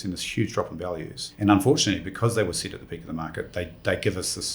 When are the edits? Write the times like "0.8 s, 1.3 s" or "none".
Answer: 1.3 s